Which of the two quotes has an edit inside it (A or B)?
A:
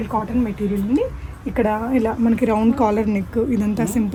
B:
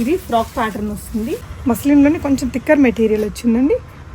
B